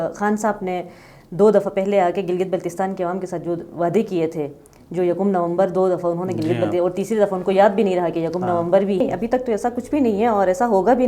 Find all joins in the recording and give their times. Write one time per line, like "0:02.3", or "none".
0:09.0